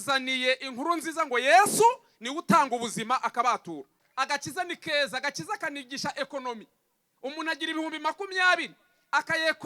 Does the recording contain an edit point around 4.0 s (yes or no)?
yes